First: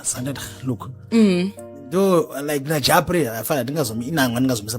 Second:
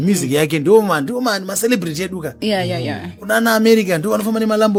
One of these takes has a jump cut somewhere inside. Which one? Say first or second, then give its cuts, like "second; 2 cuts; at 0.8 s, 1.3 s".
first; 1 cut; at 0.9 s